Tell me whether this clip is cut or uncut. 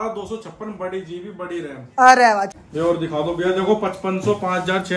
cut